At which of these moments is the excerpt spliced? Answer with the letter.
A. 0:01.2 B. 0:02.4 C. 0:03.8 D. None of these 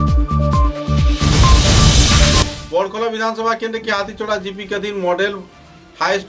B